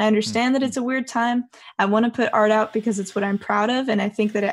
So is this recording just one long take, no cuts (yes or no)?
yes